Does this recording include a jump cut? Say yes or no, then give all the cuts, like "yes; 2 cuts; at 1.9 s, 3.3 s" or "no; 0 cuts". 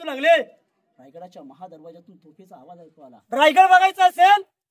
yes; 1 cut; at 3.2 s